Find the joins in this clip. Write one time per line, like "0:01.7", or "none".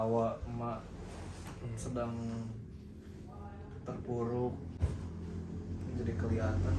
none